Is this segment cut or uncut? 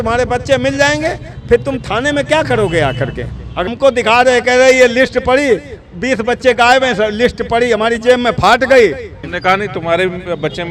cut